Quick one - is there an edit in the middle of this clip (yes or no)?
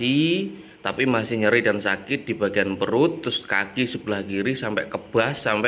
no